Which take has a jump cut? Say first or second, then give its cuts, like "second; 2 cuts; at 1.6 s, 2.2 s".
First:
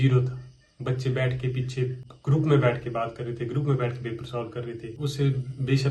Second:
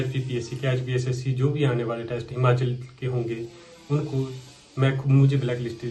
first; 2 cuts; at 2.1 s, 5.0 s